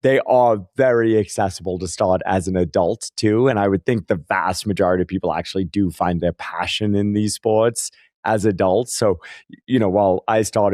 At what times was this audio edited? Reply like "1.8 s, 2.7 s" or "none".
none